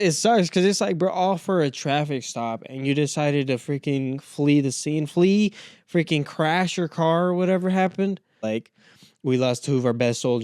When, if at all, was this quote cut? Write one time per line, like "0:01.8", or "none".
0:08.4